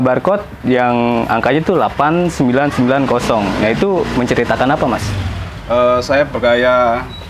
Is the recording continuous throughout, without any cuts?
yes; 0 cuts

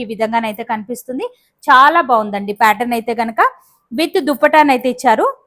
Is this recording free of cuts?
yes; 0 cuts

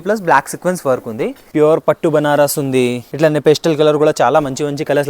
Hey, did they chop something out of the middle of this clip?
yes; 2 cuts; at 1.4 s, 3.0 s

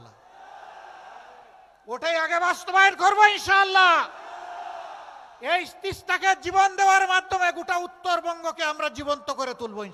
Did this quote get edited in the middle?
no; 0 cuts

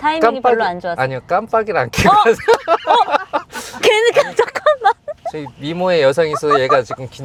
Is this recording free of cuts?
yes; 0 cuts

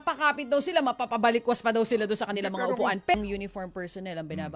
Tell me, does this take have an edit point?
yes; 1 cut; at 3.1 s

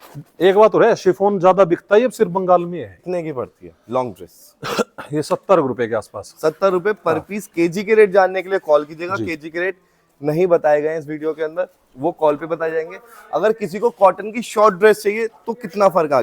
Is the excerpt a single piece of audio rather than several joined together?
no; 1 cut; at 3.0 s

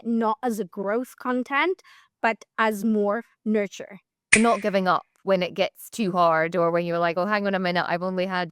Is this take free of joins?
no; 1 cut; at 4.3 s

